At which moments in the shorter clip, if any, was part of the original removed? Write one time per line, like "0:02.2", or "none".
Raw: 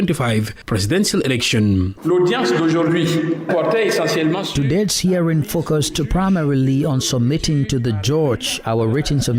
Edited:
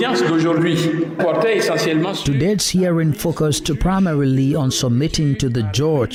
none